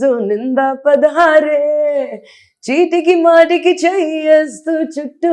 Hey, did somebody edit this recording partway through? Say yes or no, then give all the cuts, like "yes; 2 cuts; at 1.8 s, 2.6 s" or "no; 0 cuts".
no; 0 cuts